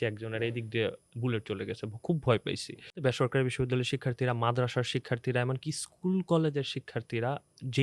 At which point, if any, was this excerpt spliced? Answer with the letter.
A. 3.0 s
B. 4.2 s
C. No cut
A